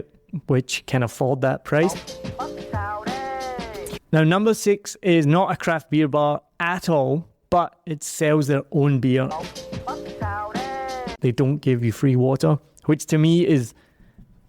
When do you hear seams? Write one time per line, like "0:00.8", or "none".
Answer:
0:02.1
0:04.0
0:09.3
0:11.2